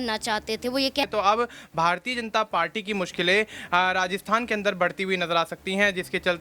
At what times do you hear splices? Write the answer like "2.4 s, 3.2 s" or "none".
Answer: 1.0 s